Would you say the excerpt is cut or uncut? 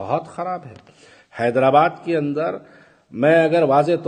uncut